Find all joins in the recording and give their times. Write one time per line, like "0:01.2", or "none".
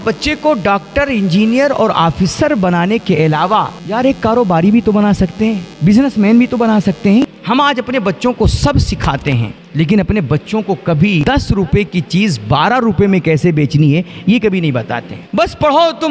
0:03.8
0:05.7
0:07.2
0:09.6
0:11.2
0:15.3

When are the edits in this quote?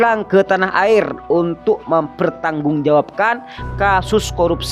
0:03.7

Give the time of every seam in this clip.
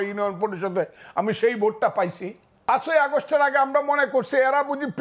0:02.7

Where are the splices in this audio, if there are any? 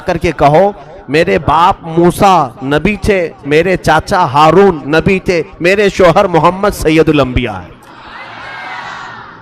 none

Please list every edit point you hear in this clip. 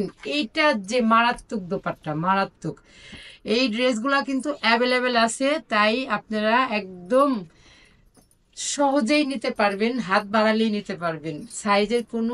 none

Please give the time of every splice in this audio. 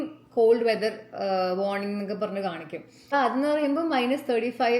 0:03.1

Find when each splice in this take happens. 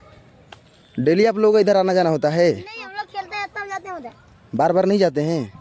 none

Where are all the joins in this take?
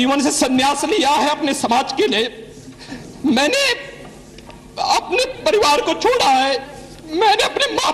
none

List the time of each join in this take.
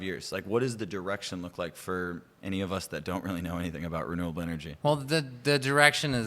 0:04.7

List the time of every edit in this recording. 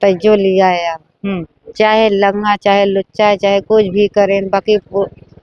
none

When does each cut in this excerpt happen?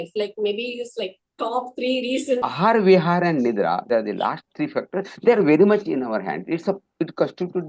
0:02.5
0:03.9

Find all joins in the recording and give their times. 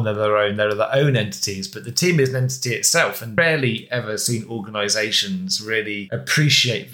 0:03.3
0:06.0

